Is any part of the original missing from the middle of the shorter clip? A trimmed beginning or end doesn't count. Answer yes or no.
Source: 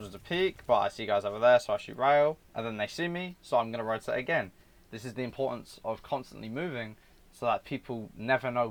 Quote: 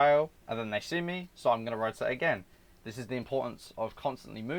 no